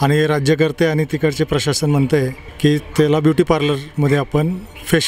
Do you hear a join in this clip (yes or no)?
yes